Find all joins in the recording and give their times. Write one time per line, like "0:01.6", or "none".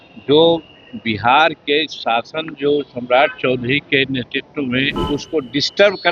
0:05.0